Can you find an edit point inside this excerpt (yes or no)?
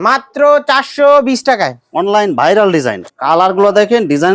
yes